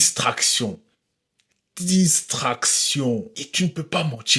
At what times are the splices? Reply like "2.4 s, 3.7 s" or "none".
3.4 s